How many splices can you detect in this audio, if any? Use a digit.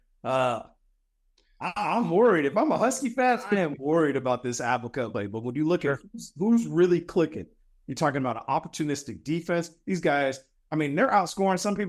1